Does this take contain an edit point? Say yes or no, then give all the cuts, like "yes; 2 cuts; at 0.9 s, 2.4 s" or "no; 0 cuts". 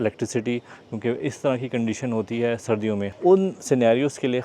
yes; 1 cut; at 3.1 s